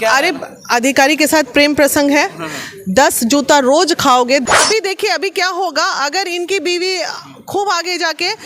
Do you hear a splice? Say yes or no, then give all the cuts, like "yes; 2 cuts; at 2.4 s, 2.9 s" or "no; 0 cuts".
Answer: yes; 1 cut; at 4.4 s